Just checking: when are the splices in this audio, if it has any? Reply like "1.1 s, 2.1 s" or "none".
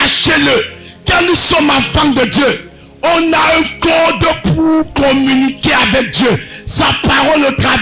none